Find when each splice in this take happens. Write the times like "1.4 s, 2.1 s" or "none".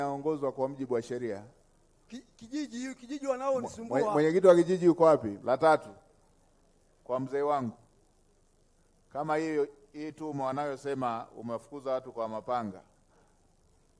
5.3 s

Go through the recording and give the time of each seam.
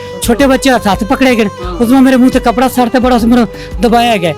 none

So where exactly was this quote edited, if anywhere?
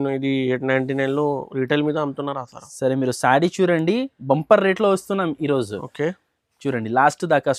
none

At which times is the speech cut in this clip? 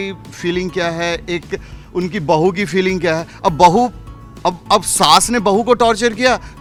none

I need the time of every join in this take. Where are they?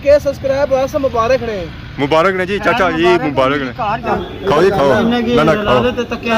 4.2 s

